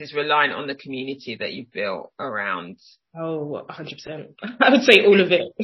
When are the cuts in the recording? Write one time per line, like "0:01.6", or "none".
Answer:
none